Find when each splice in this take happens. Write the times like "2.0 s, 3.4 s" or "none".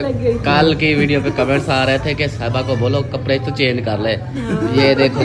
none